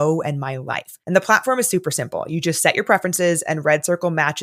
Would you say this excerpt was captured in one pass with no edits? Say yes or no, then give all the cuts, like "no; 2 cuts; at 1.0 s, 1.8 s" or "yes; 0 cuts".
yes; 0 cuts